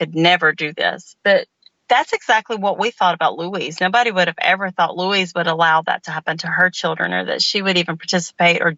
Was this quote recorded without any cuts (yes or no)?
yes